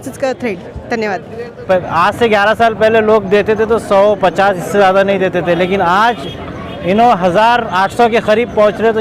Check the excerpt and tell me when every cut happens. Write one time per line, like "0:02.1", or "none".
0:01.6